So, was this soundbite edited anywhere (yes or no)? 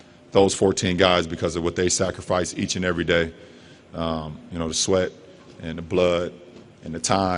no